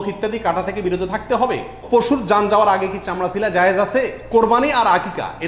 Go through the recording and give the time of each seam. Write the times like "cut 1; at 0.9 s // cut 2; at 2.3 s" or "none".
cut 1; at 1.7 s // cut 2; at 4.2 s